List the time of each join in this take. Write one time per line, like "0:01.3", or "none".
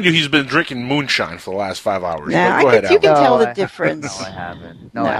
0:01.5